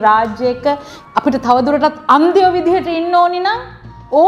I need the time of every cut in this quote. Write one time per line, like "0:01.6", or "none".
0:00.9